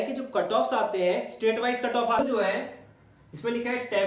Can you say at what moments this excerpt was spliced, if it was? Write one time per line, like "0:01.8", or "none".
0:02.2